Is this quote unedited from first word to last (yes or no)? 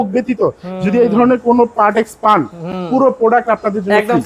yes